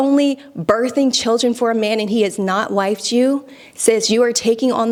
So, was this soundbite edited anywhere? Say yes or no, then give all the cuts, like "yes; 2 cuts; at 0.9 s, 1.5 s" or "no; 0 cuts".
no; 0 cuts